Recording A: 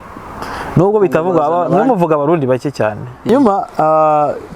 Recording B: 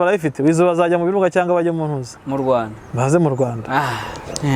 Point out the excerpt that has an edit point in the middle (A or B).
A